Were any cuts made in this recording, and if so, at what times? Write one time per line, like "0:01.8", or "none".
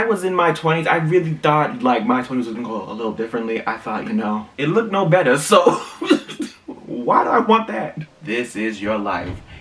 0:04.5
0:08.0